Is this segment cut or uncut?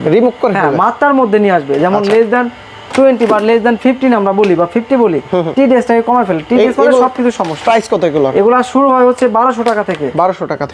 uncut